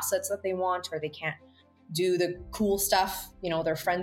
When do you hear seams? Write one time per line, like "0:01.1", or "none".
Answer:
none